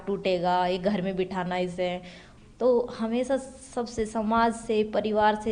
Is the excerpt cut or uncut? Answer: uncut